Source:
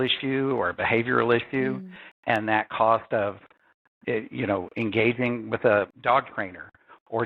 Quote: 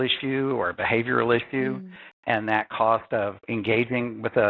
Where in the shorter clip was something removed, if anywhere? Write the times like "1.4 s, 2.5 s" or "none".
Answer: 3.4 s